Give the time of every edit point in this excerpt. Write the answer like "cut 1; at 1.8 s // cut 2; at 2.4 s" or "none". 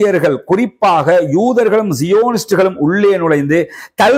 none